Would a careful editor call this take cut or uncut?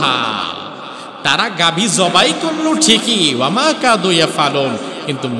uncut